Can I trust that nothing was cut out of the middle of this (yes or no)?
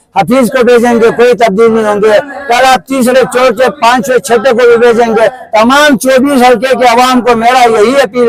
yes